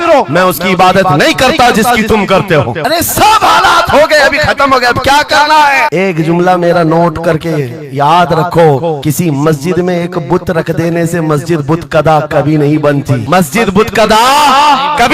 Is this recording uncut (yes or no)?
yes